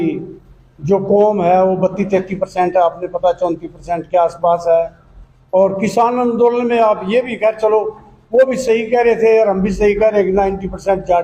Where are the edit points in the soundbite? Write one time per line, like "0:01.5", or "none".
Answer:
none